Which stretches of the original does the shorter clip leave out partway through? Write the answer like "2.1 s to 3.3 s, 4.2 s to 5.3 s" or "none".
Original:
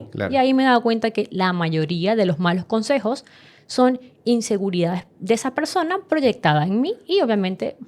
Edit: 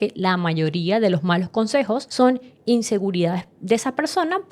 3.2 s to 3.7 s